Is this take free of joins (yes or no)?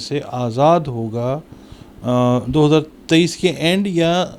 yes